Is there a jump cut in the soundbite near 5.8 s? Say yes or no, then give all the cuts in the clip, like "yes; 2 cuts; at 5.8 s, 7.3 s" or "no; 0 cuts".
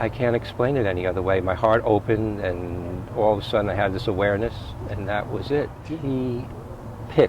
yes; 1 cut; at 5.8 s